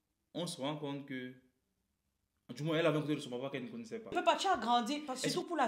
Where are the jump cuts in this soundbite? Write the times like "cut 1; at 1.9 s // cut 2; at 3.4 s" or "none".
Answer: cut 1; at 4.1 s

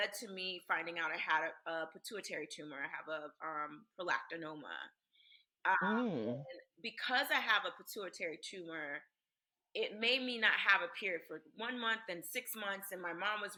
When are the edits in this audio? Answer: none

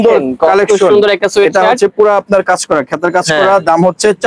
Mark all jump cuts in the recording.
none

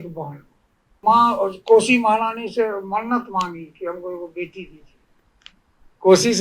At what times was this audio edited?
cut 1; at 1.0 s

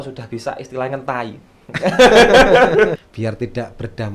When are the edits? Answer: cut 1; at 3.1 s

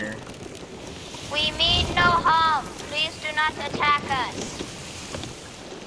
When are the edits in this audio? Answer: none

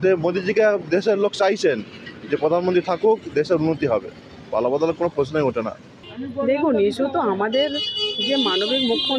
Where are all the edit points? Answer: cut 1; at 6.1 s

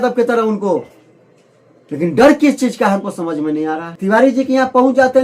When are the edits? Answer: cut 1; at 3.9 s

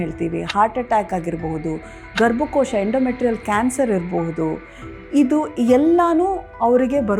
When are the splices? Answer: none

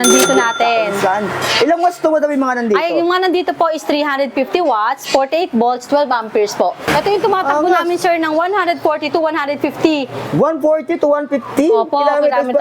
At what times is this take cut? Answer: cut 1; at 6.9 s

